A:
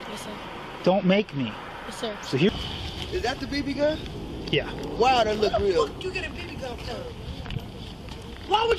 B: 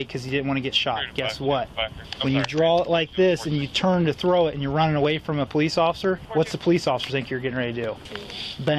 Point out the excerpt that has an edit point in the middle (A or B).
A